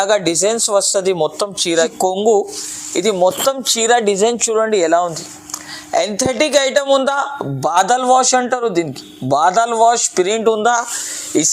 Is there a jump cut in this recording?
yes; 1 cut; at 1.9 s

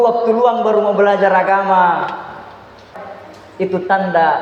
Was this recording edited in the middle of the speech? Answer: yes; 1 cut; at 3.0 s

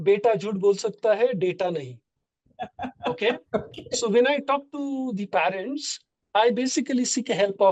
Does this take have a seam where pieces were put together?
no; 0 cuts

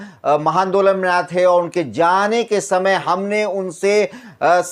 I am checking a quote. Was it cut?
no; 0 cuts

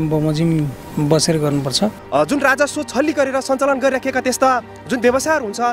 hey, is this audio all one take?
no; 1 cut; at 2.0 s

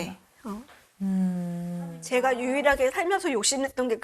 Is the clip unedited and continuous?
no; 1 cut; at 1.9 s

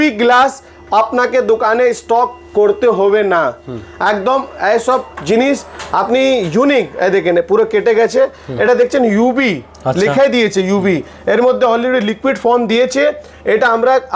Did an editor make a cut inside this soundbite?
no; 0 cuts

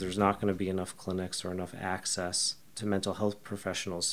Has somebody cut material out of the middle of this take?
no; 0 cuts

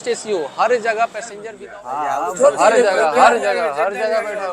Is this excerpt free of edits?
no; 1 cut; at 1.4 s

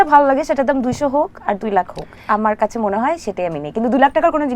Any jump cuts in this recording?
no; 0 cuts

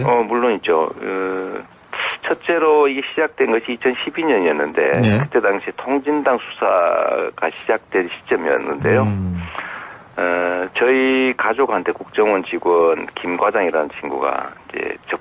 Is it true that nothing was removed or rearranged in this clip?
yes; 0 cuts

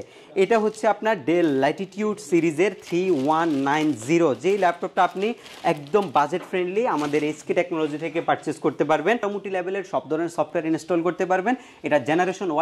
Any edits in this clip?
yes; 1 cut; at 9.2 s

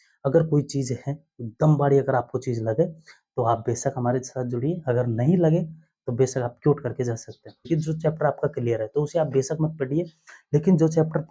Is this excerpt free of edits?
no; 1 cut; at 7.6 s

